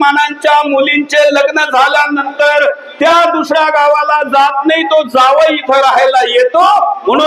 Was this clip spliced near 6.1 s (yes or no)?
no